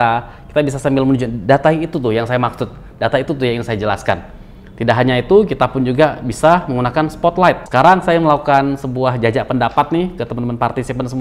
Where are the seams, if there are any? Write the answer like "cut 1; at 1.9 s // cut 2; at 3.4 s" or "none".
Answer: cut 1; at 7.6 s